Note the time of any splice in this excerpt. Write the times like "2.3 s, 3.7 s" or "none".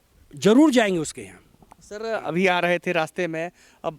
none